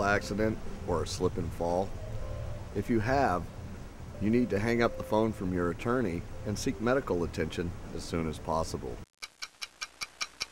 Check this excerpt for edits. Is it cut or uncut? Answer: cut